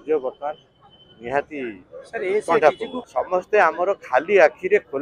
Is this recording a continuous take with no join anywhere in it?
no; 1 cut; at 2.9 s

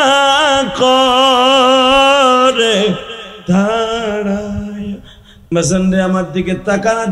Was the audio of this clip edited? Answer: yes; 1 cut; at 5.5 s

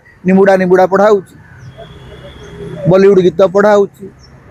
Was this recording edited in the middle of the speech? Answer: no; 0 cuts

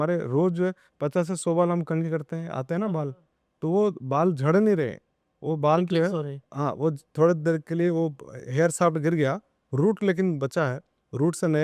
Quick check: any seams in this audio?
no; 0 cuts

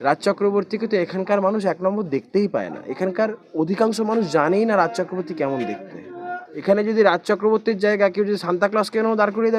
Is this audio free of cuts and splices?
no; 1 cut; at 6.5 s

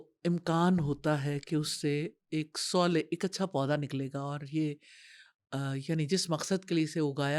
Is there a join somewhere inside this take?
no; 0 cuts

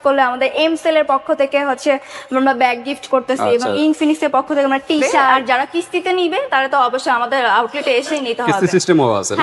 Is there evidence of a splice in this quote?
yes; 1 cut; at 5.3 s

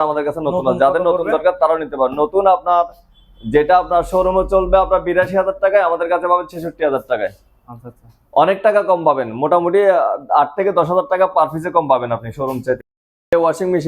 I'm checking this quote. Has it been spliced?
no; 0 cuts

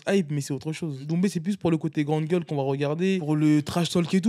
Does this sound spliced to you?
yes; 2 cuts; at 1.0 s, 3.2 s

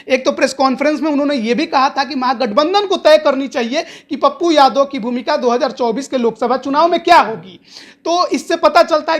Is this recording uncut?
yes; 0 cuts

